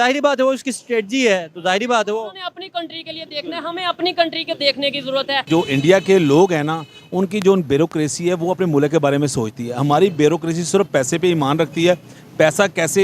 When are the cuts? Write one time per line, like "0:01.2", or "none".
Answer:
0:05.5